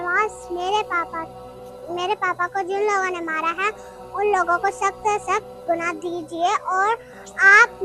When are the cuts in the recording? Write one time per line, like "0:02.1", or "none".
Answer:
none